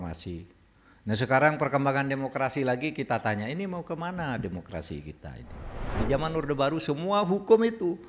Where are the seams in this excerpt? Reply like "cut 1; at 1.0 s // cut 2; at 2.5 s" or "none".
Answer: cut 1; at 5.9 s

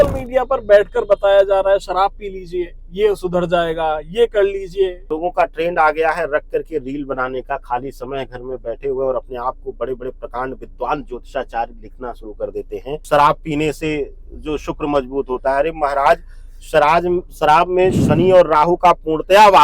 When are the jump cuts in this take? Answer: cut 1; at 5.1 s // cut 2; at 13.0 s

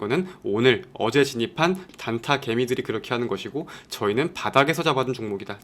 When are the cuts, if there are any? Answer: cut 1; at 1.9 s

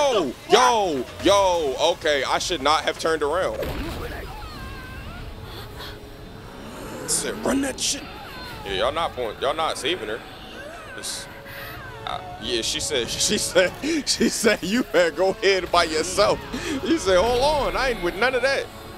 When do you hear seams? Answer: cut 1; at 3.6 s

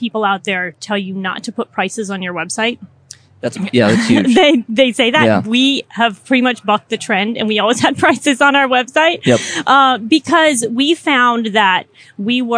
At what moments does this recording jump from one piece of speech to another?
none

